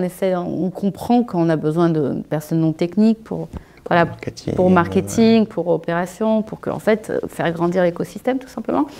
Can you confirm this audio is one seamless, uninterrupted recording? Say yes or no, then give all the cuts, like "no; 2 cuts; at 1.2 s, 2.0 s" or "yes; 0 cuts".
yes; 0 cuts